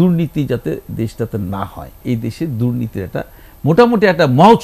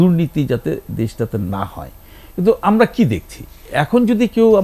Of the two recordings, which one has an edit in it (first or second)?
first